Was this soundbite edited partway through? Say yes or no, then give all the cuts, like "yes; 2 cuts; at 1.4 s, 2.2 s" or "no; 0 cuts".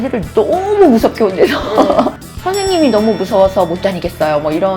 yes; 1 cut; at 2.3 s